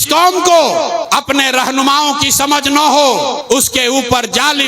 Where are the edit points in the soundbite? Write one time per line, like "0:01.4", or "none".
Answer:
0:01.0
0:03.4

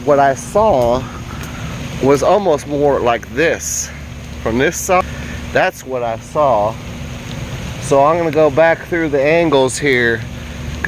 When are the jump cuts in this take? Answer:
0:05.0

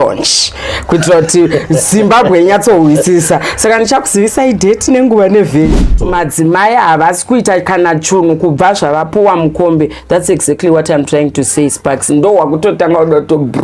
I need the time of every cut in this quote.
0:05.9

